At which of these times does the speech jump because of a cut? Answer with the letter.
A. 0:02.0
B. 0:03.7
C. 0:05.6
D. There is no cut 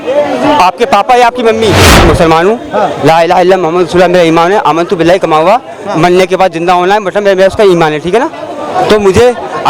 A